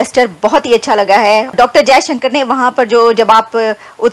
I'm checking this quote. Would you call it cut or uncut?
uncut